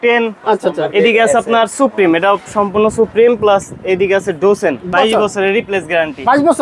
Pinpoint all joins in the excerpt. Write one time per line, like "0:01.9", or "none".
0:04.9